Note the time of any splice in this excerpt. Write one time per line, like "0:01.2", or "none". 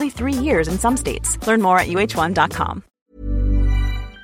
0:02.9

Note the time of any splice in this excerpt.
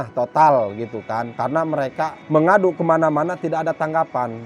none

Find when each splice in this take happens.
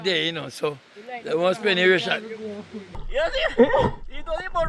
0:03.0

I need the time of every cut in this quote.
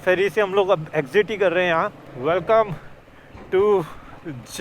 0:02.0

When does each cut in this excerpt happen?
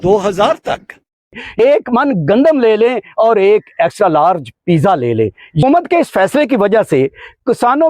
0:01.6
0:05.6

